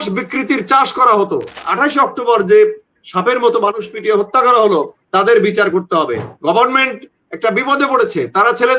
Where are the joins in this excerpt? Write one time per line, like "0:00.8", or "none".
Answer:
0:01.6
0:06.3